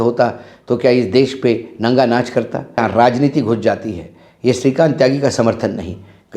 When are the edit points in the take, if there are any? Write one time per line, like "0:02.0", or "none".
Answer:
0:02.8